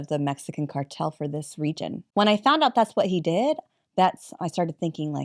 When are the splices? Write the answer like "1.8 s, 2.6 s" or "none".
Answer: 2.0 s